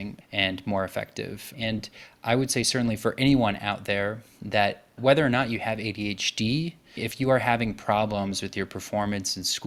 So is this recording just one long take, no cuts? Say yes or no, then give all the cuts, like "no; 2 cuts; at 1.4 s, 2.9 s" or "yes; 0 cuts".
yes; 0 cuts